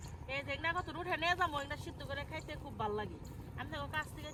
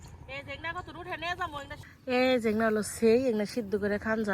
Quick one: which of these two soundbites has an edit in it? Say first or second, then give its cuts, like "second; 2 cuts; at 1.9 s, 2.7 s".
second; 1 cut; at 1.9 s